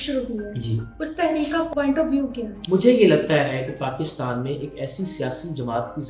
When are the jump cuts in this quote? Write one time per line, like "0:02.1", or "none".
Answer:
0:02.5